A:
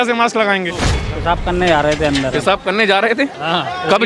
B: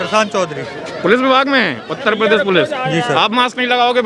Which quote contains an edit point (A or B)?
A